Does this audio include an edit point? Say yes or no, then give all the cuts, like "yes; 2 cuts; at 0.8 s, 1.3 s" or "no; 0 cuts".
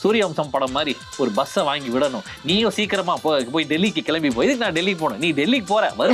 no; 0 cuts